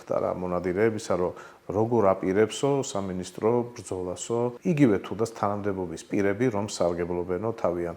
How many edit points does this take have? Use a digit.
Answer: 1